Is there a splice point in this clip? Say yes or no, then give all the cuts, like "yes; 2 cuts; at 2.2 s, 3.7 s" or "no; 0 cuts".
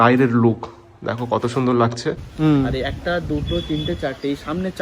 yes; 1 cut; at 2.3 s